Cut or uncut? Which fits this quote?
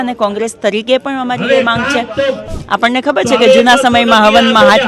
cut